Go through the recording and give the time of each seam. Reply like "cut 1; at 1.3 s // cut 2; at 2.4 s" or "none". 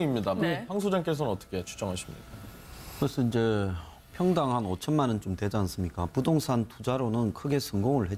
cut 1; at 4.8 s